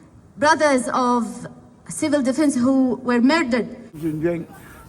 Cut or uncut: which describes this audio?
cut